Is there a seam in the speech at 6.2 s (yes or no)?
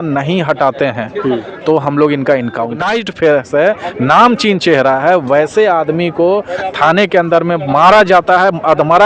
no